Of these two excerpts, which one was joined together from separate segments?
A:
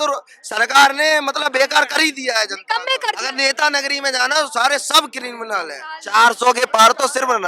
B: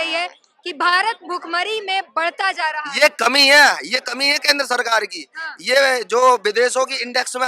A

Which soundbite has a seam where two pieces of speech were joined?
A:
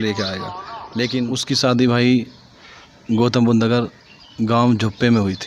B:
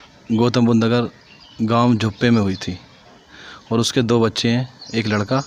A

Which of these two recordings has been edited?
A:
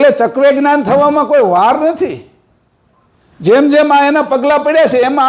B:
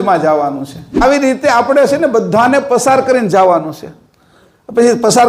B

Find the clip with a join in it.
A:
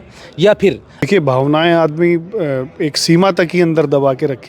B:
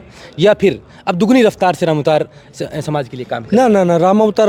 A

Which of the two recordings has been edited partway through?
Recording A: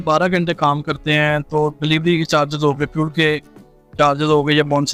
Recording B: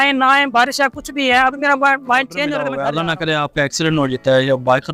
B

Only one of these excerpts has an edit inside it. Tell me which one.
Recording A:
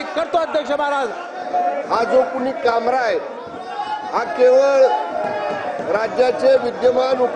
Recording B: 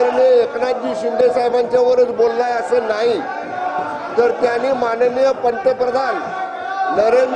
A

